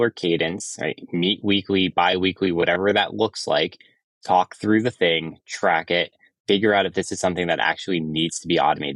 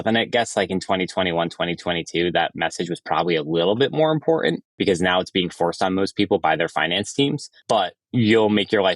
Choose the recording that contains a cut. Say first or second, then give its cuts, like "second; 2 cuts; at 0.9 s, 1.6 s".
second; 2 cuts; at 4.7 s, 7.5 s